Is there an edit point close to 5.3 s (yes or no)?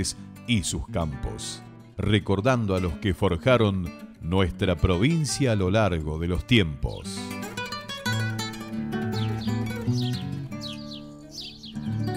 no